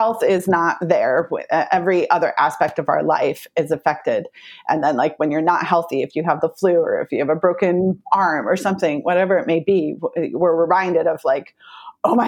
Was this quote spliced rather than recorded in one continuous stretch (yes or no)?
no